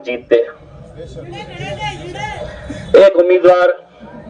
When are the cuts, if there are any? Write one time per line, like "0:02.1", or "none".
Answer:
none